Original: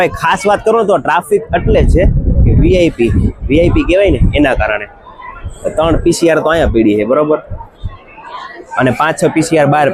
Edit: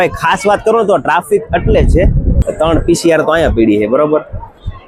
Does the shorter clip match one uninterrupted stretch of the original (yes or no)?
no